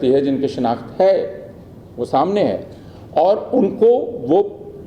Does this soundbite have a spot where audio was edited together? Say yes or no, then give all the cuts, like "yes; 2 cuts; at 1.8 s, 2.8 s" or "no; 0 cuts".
no; 0 cuts